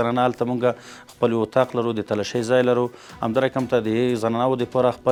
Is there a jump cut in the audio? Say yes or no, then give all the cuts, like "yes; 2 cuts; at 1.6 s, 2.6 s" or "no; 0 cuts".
no; 0 cuts